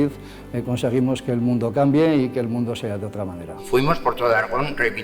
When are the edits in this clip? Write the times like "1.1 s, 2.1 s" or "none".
3.5 s